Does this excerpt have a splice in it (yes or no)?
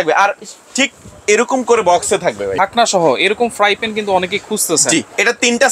yes